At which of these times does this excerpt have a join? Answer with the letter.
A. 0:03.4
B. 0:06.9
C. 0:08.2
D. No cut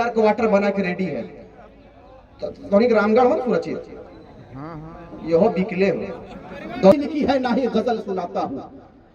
B